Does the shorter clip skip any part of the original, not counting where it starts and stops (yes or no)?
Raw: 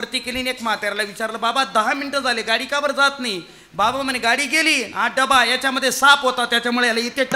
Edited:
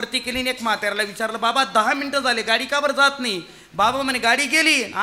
no